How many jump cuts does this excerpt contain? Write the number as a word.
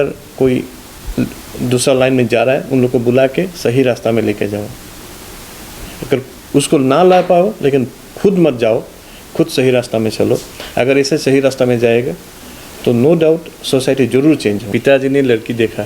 one